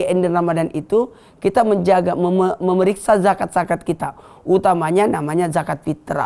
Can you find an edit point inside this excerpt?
no; 0 cuts

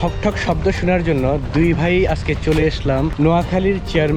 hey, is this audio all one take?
no; 1 cut; at 3.1 s

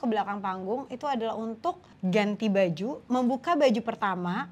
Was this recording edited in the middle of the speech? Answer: yes; 1 cut; at 1.9 s

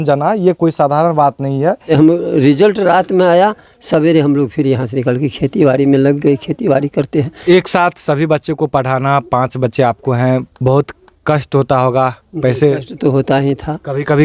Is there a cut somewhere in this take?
yes; 2 cuts; at 1.9 s, 7.3 s

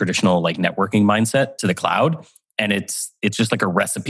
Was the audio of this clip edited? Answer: no; 0 cuts

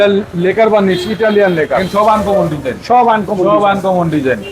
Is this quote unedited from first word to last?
no; 1 cut; at 1.8 s

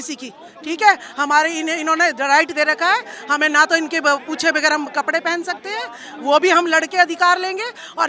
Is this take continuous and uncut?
yes; 0 cuts

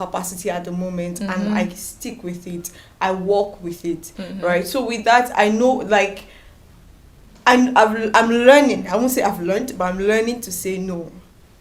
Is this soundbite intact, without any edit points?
yes; 0 cuts

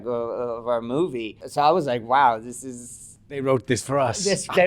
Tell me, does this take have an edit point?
yes; 1 cut; at 1.4 s

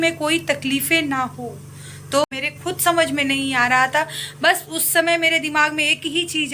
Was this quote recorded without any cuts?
no; 1 cut; at 2.2 s

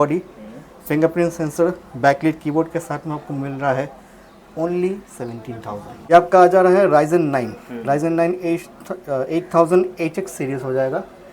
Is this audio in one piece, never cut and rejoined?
no; 1 cut; at 6.1 s

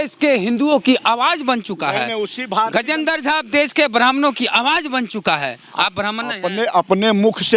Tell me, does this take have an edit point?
no; 0 cuts

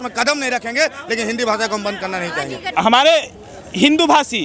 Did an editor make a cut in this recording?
yes; 1 cut; at 2.8 s

